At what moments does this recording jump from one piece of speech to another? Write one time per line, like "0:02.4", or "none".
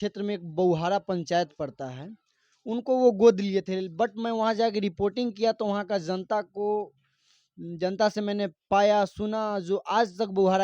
none